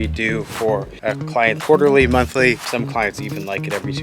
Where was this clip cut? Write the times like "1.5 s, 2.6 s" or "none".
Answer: 1.6 s